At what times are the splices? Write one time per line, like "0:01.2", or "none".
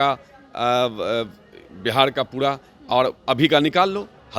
none